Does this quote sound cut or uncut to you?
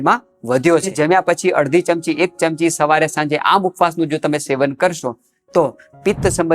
cut